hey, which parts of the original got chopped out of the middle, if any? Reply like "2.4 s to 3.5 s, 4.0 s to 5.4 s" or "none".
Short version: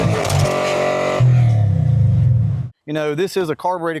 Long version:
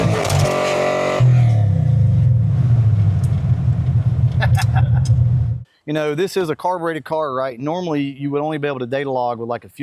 2.6 s to 5.6 s